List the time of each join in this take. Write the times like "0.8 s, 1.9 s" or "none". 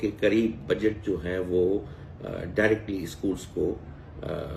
none